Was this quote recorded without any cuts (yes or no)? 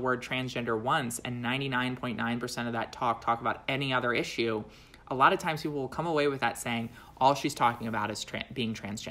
yes